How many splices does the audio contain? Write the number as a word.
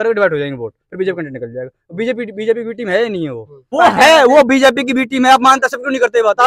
one